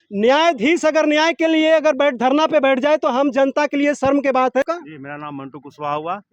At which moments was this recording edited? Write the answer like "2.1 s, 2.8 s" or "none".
4.6 s